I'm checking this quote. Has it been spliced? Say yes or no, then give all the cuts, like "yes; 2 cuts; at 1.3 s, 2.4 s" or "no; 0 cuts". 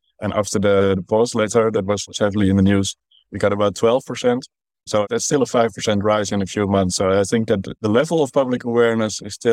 no; 0 cuts